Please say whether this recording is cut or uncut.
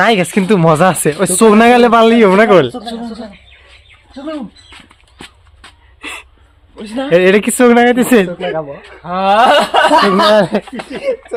uncut